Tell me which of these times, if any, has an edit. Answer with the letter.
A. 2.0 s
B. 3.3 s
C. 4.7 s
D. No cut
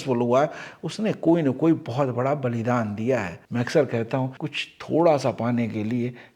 D